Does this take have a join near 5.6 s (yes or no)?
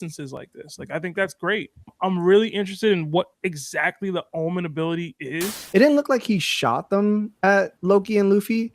yes